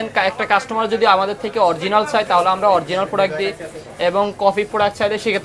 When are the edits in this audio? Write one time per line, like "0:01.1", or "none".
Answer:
none